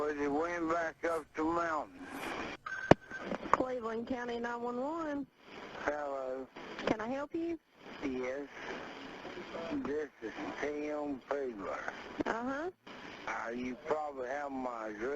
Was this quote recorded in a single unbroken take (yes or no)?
no